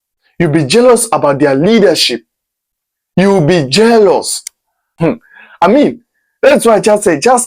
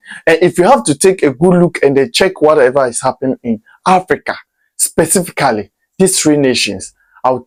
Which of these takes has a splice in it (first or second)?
first